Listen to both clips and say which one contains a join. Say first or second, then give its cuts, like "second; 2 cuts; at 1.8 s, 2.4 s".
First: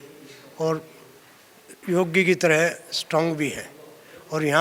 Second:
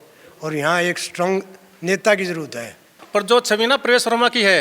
second; 1 cut; at 2.9 s